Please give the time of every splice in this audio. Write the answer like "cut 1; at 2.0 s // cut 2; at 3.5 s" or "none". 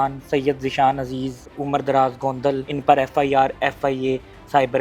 cut 1; at 2.6 s